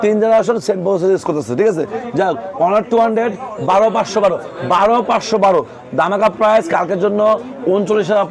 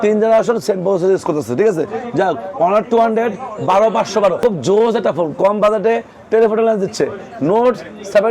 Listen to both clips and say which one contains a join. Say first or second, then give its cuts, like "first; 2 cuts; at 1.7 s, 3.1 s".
second; 1 cut; at 4.4 s